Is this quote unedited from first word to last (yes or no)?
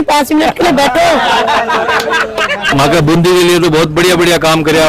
no